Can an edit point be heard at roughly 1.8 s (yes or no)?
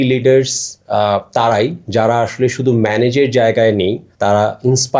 no